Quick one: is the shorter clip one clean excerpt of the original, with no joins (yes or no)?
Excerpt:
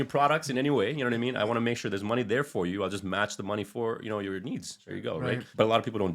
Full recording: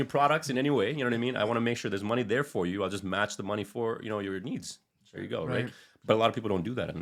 no